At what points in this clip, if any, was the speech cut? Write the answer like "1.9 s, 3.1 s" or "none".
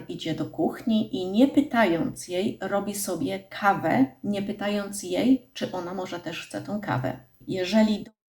7.4 s